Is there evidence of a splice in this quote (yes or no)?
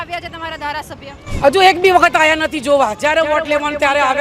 no